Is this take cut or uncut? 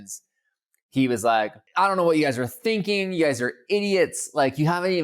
cut